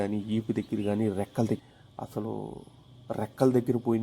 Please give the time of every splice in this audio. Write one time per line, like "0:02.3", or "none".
0:01.6